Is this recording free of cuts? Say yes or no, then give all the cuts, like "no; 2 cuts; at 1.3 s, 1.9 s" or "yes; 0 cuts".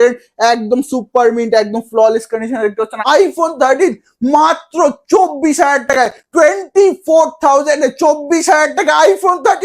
no; 1 cut; at 3.0 s